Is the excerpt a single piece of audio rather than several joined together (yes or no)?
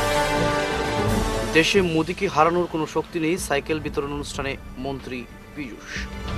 yes